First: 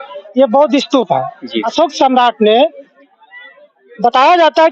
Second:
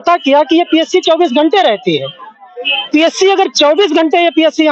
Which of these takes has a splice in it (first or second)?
first